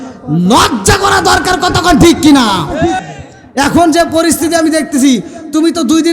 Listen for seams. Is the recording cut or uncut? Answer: cut